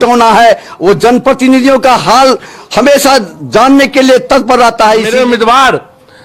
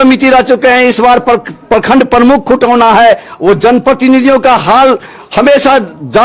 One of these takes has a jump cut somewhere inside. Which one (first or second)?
first